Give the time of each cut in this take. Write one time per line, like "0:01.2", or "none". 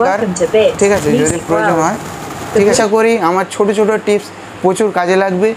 0:02.8

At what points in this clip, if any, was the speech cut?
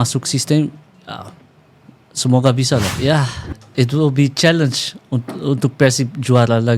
0:02.9

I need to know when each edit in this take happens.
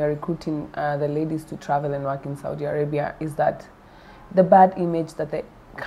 none

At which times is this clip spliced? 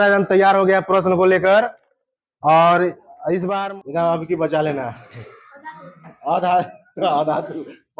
0:03.5

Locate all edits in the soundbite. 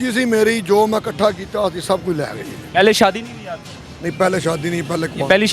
none

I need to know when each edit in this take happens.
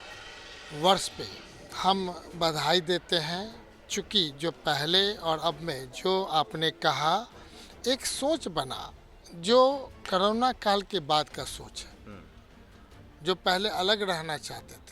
none

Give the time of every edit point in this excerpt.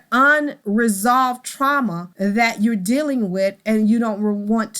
0:02.1

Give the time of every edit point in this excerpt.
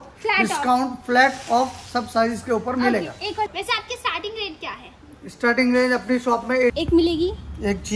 0:03.5
0:06.7

